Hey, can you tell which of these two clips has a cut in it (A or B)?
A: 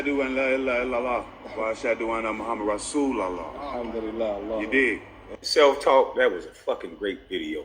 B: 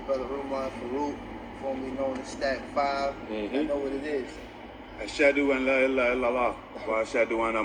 A